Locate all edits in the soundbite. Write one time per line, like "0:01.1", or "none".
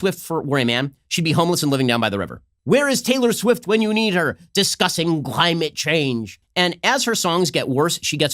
0:02.5
0:06.3

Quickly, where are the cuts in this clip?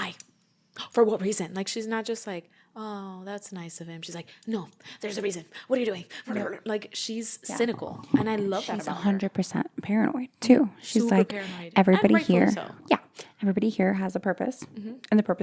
none

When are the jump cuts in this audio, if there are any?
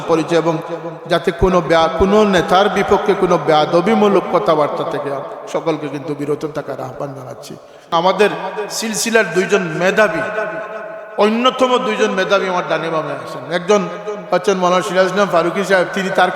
0:07.9

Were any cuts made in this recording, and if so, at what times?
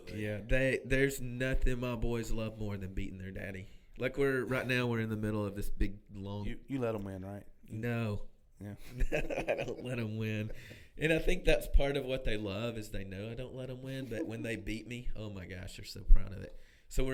none

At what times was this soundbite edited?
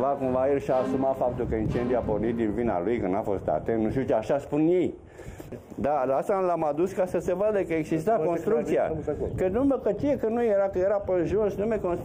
0:05.4

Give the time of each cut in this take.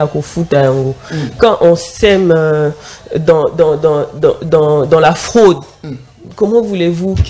none

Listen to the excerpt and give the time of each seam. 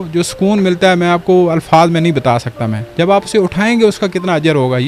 0:02.8

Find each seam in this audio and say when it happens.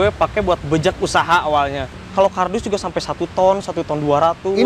0:01.9

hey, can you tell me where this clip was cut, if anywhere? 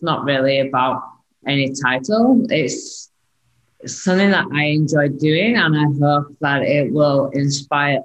0:01.4

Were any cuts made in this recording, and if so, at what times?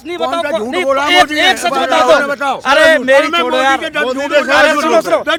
none

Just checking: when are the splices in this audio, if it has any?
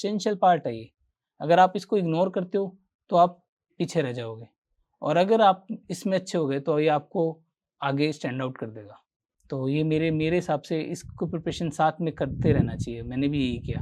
none

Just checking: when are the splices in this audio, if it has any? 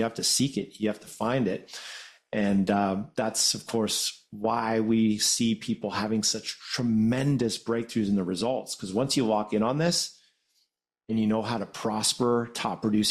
none

